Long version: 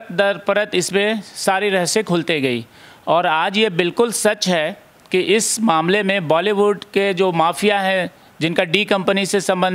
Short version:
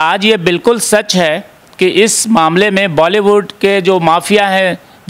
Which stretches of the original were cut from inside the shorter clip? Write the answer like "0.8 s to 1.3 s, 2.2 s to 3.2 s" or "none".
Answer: none

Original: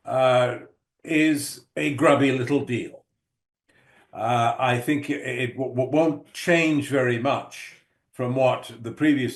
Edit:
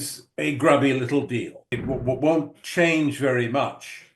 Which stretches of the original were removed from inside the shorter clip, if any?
3.1 s to 5.4 s

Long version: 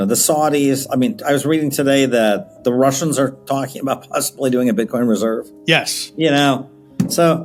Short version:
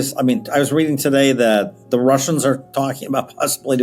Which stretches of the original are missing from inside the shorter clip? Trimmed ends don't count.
none

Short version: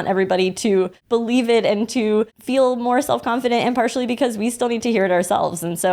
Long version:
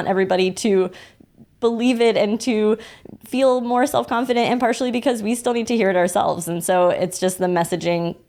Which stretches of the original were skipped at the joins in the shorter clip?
1.0 s to 1.5 s, 2.9 s to 3.2 s

